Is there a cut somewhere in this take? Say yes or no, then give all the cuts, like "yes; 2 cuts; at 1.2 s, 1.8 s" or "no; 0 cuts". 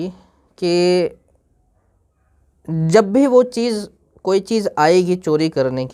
no; 0 cuts